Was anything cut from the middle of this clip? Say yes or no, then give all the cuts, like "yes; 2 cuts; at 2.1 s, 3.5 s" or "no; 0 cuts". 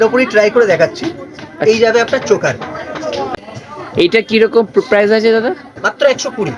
yes; 1 cut; at 3.3 s